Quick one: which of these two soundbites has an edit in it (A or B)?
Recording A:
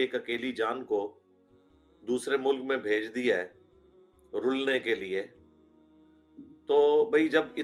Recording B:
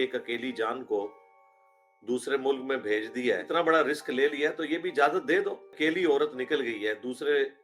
B